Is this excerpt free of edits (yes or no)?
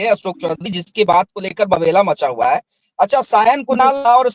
yes